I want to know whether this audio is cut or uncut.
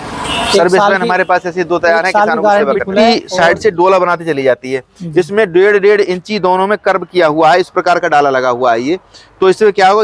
cut